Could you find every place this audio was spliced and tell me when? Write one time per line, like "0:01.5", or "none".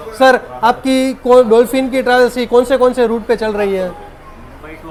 none